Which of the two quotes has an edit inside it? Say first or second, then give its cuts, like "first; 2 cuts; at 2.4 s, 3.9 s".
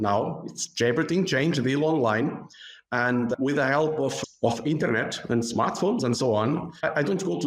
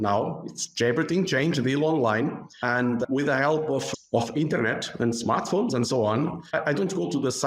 second; 1 cut; at 2.5 s